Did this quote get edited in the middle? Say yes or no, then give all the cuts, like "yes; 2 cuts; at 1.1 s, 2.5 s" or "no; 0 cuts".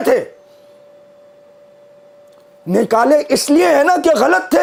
no; 0 cuts